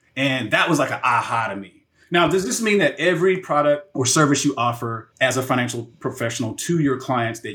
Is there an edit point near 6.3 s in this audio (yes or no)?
no